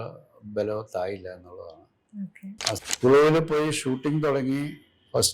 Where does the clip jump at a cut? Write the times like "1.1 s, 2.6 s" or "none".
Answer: 2.8 s